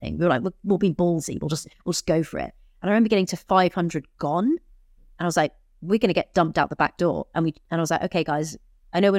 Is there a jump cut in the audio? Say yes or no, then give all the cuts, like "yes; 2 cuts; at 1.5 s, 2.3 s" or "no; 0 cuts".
no; 0 cuts